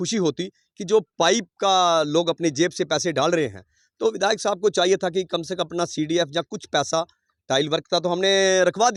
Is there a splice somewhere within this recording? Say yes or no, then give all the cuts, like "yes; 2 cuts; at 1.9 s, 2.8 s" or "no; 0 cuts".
no; 0 cuts